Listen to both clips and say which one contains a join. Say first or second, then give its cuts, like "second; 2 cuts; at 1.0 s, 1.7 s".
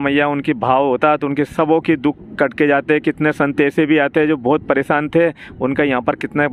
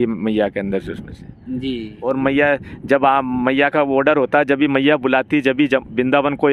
second; 1 cut; at 2.1 s